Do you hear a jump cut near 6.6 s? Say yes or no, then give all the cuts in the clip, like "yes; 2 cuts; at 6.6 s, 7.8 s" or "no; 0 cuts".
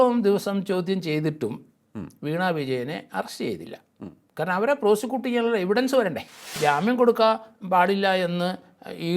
yes; 1 cut; at 6.6 s